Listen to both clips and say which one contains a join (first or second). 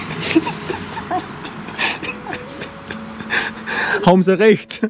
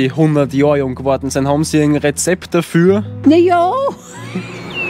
second